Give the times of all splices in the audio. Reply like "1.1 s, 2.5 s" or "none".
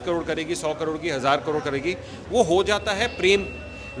none